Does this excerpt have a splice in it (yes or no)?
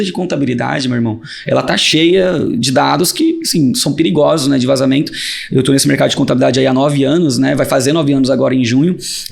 no